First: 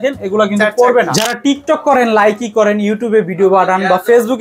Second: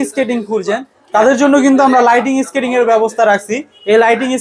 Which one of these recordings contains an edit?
first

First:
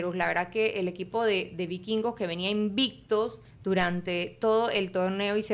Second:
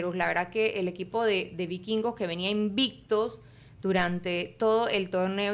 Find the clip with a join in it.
first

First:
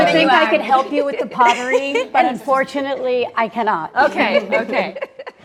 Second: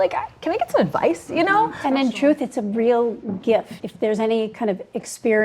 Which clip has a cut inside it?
second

